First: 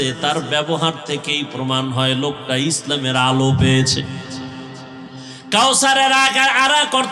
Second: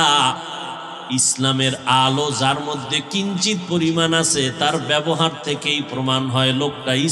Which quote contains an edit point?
first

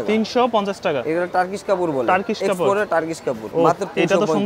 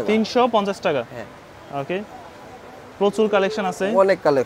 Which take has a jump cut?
first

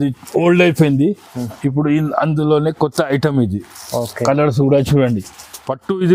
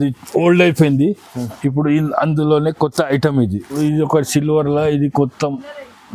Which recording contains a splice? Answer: second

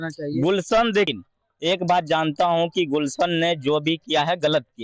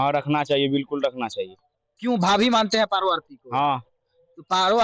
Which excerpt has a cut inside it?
first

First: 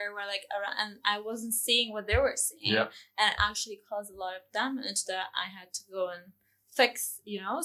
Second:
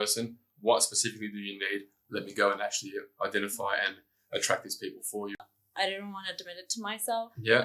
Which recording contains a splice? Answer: second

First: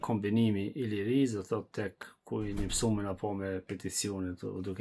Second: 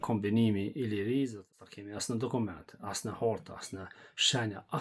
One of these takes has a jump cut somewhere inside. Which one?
second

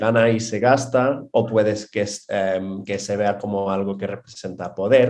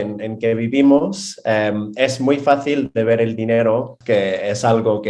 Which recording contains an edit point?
second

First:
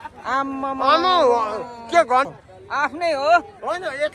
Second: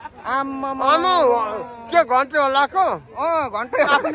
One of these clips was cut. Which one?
first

